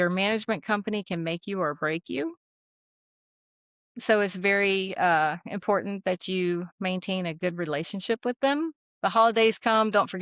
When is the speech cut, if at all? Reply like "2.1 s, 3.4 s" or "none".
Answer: 8.9 s

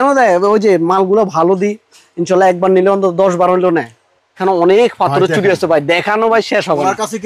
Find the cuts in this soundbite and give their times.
4.4 s

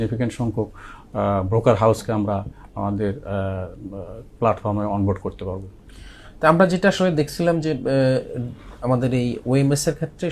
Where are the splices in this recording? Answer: none

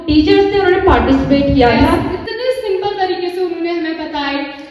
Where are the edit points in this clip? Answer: 1.8 s

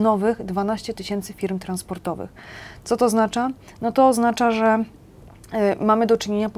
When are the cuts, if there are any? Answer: none

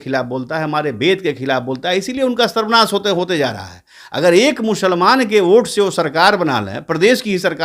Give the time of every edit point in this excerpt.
none

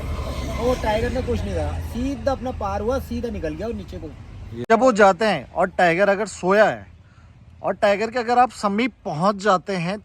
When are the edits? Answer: 4.7 s

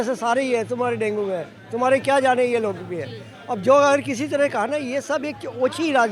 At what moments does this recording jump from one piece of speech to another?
none

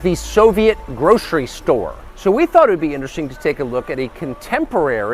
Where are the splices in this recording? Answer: 2.0 s

